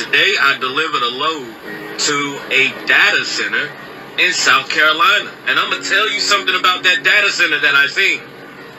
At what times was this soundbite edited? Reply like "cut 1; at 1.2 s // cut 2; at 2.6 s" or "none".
none